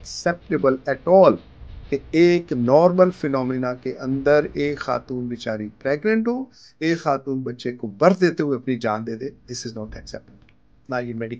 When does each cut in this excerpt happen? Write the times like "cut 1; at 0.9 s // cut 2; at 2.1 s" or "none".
none

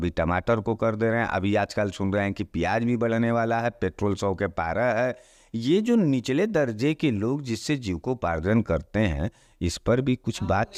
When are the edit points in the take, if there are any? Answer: none

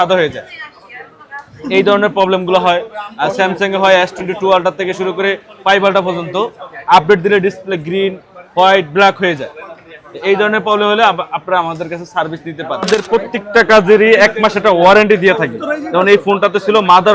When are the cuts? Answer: cut 1; at 12.9 s

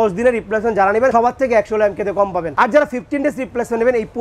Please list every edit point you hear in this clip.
cut 1; at 1.1 s // cut 2; at 2.5 s

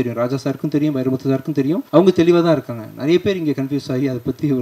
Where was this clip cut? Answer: cut 1; at 1.8 s

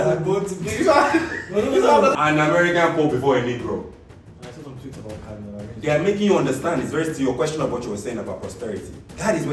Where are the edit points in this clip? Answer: cut 1; at 2.2 s

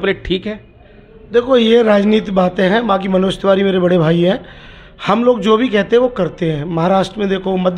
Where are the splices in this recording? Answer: none

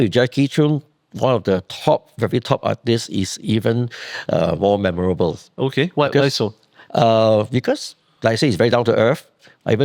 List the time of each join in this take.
none

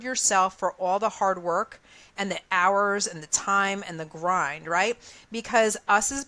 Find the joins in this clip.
none

